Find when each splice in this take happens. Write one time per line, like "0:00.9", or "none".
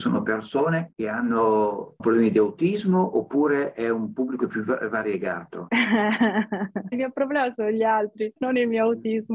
0:00.9
0:02.0
0:05.5
0:06.9
0:08.4